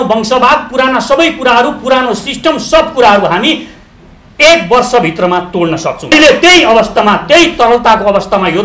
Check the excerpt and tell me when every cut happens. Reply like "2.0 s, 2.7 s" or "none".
6.1 s